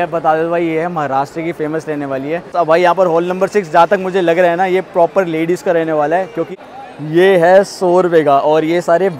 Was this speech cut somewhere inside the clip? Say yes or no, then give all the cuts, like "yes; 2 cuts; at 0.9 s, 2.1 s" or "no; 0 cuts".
yes; 2 cuts; at 2.5 s, 6.4 s